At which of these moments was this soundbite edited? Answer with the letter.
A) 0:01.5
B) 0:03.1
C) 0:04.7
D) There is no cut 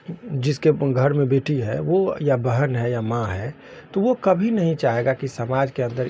D